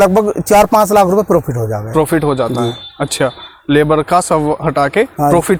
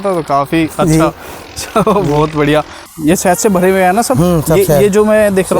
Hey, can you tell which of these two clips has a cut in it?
second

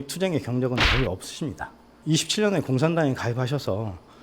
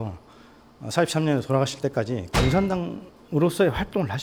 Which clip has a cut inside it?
first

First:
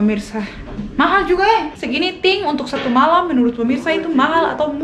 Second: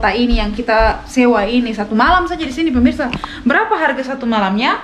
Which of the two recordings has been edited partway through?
first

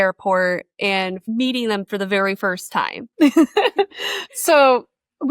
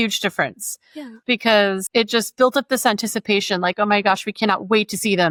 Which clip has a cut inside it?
first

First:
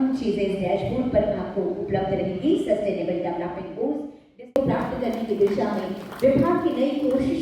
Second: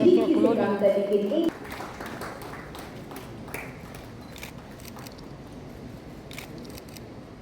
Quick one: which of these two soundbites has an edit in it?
first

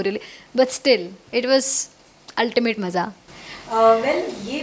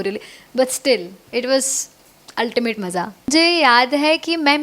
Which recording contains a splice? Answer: second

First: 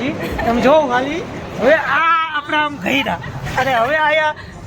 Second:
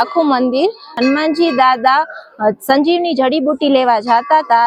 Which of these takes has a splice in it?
second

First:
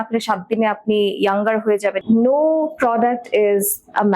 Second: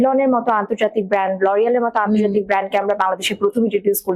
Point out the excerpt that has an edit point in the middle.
first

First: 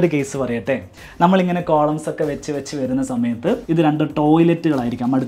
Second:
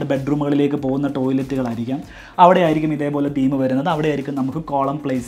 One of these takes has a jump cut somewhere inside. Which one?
first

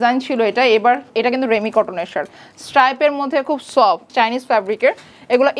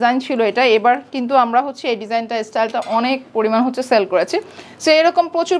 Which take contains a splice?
first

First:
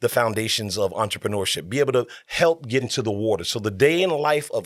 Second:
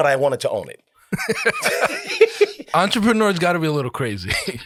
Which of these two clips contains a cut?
first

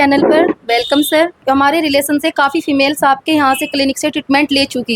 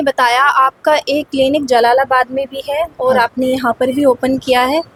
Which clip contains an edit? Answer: first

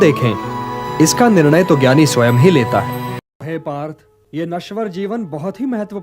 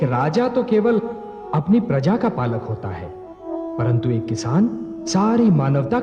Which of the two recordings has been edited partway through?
first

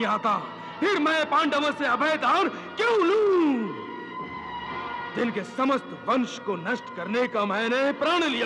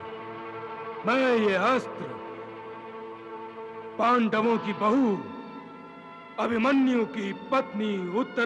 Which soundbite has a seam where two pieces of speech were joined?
first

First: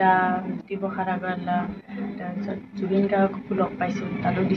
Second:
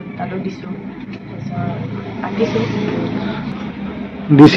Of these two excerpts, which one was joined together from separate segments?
second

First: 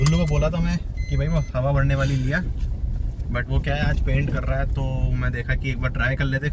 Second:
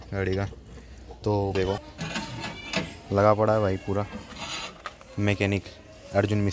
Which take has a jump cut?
second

